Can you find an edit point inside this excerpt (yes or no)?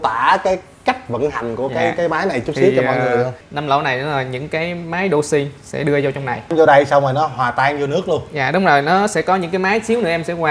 yes